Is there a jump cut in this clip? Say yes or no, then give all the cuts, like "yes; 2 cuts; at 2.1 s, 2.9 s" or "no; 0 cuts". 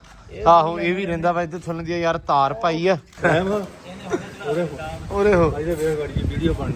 yes; 1 cut; at 3.2 s